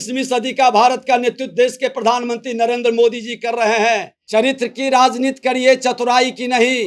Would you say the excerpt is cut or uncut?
cut